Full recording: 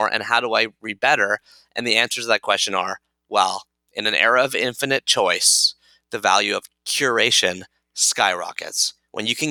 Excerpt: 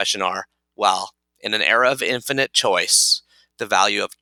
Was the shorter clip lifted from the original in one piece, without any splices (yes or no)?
yes